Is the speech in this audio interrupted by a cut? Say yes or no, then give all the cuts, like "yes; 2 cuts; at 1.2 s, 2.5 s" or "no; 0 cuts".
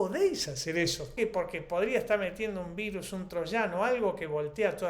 yes; 1 cut; at 1.1 s